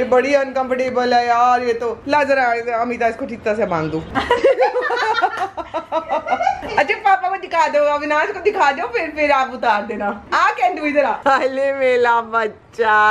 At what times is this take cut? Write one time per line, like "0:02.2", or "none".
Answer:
none